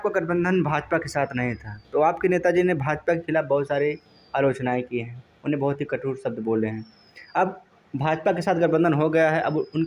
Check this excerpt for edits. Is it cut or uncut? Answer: uncut